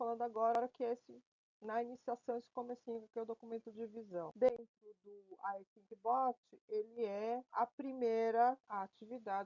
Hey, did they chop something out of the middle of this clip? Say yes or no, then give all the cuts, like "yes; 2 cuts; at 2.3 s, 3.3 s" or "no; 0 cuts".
yes; 3 cuts; at 4.3 s, 7.5 s, 8.6 s